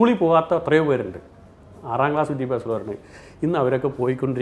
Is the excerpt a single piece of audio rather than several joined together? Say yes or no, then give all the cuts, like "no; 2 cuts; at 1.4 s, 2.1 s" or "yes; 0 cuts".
yes; 0 cuts